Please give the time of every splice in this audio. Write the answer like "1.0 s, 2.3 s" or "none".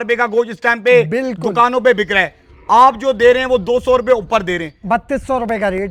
none